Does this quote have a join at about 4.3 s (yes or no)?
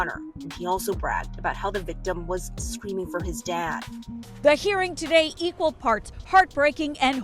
yes